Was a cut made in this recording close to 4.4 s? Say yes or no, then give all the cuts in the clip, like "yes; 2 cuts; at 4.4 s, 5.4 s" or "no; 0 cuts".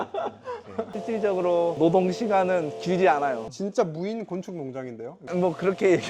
no; 1 cut; at 0.9 s